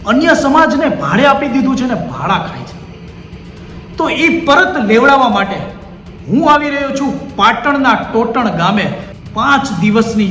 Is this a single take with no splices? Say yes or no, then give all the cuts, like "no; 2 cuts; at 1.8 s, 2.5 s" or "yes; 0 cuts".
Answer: no; 1 cut; at 9.1 s